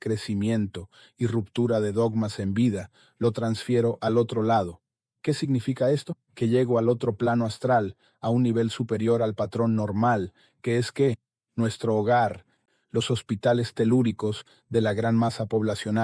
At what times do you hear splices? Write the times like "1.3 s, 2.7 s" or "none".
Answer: 12.6 s